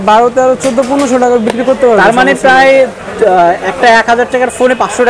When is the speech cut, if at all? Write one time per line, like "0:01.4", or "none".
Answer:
none